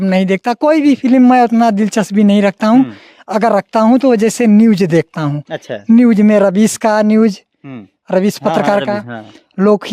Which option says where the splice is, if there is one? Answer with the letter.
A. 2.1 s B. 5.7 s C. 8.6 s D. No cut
D